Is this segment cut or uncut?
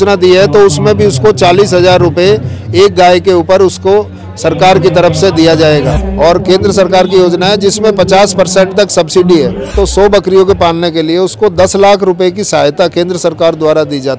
cut